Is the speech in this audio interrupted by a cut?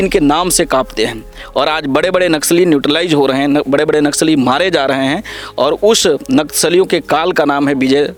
no; 0 cuts

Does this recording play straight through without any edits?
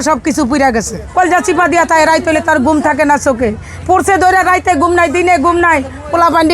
no; 1 cut; at 1.0 s

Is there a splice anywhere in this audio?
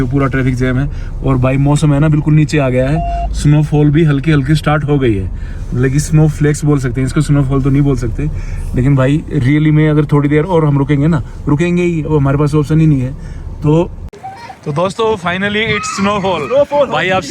yes; 1 cut; at 14.1 s

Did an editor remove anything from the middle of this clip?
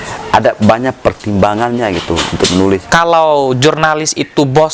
yes; 1 cut; at 2.8 s

